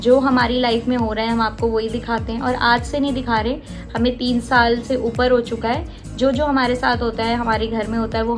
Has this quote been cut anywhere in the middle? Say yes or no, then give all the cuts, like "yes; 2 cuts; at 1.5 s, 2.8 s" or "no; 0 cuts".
no; 0 cuts